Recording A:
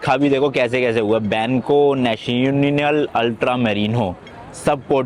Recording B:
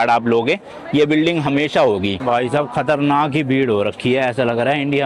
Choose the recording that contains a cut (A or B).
B